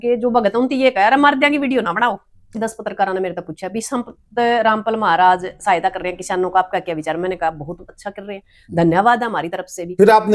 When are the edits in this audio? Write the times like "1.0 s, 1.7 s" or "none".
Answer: 2.6 s